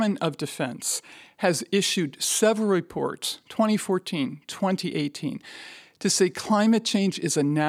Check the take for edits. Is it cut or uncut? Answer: uncut